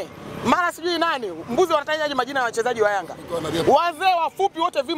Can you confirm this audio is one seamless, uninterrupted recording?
yes; 0 cuts

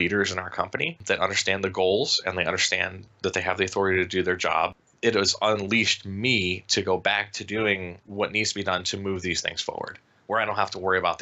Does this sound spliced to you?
yes; 3 cuts; at 1.0 s, 4.9 s, 8.0 s

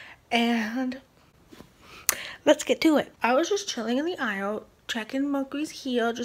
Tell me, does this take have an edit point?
yes; 1 cut; at 3.1 s

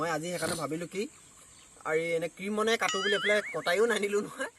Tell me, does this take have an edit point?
no; 0 cuts

